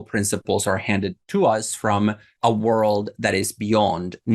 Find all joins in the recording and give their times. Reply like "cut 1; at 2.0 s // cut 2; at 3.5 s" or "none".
cut 1; at 1.2 s // cut 2; at 2.3 s